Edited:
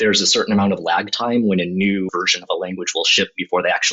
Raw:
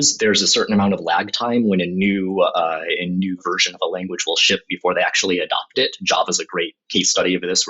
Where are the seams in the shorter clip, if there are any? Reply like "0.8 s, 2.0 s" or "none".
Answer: 2.1 s